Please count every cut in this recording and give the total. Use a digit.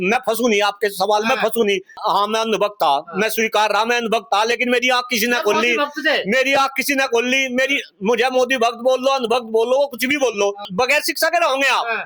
2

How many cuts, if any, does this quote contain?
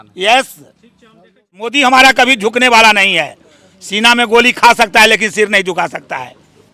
1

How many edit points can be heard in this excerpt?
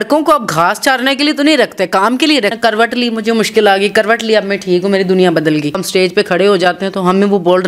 2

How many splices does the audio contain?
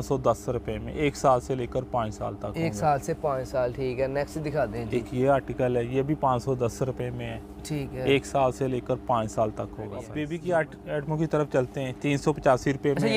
1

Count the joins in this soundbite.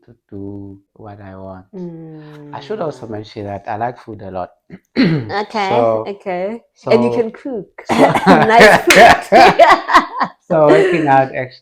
1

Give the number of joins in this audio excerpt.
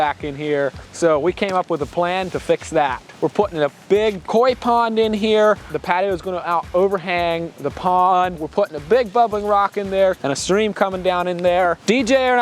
3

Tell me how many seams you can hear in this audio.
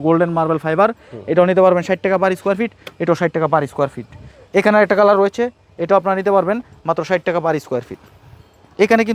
0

